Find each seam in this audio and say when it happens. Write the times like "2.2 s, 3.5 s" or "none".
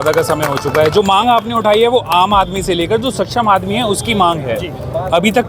none

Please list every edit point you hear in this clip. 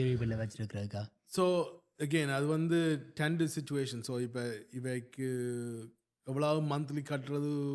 none

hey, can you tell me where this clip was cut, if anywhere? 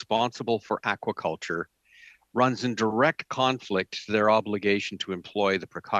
none

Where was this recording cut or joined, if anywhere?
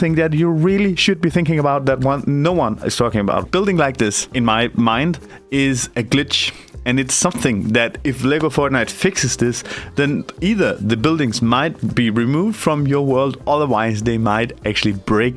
3.5 s, 4.2 s, 5.3 s

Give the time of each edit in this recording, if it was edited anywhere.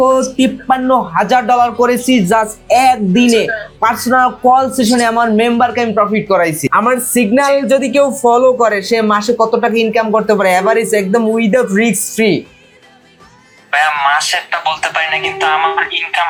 none

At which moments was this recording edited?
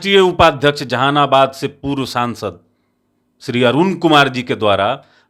none

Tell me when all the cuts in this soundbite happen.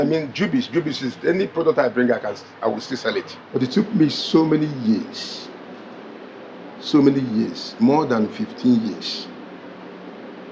3.4 s

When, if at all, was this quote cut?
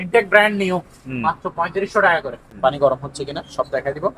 2.5 s

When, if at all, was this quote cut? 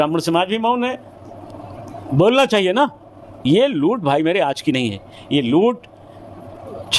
none

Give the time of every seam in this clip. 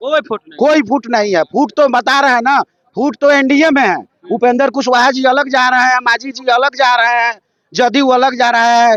none

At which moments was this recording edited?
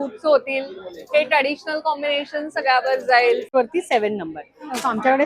3.5 s

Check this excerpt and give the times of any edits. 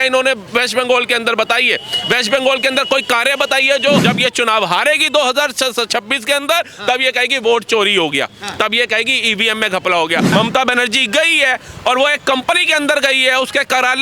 4.0 s, 10.3 s

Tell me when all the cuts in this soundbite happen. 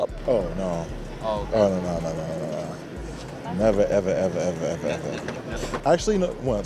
5.5 s

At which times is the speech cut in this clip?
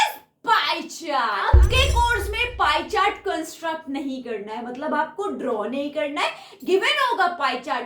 1.5 s

